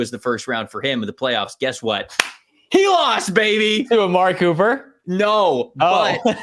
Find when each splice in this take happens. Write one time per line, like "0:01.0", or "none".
none